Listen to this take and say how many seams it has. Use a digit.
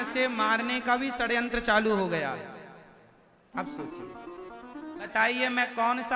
1